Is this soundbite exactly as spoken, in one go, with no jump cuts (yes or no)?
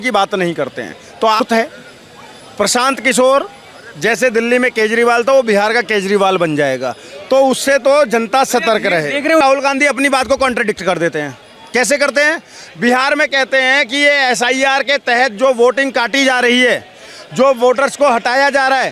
no